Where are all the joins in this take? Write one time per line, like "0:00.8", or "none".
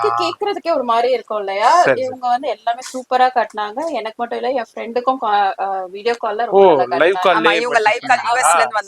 none